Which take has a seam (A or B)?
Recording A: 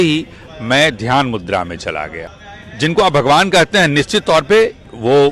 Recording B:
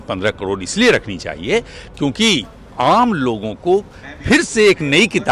A